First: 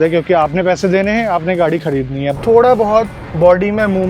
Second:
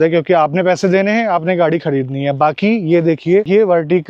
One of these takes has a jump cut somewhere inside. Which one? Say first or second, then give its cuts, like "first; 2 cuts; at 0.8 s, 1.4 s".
first; 1 cut; at 2.3 s